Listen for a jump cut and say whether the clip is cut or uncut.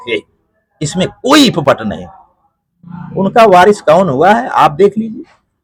uncut